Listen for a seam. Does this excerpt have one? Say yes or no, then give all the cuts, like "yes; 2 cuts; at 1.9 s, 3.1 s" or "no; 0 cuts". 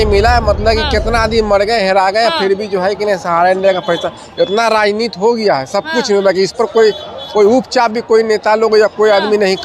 no; 0 cuts